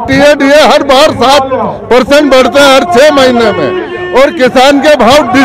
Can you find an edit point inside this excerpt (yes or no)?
no